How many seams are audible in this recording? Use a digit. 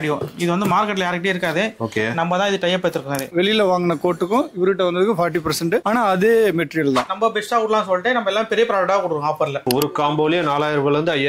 3